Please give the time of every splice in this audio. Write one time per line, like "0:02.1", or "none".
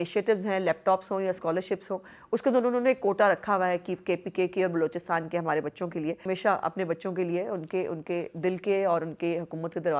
0:06.2